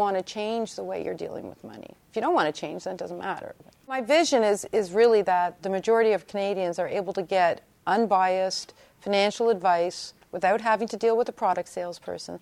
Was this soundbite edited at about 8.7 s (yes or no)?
no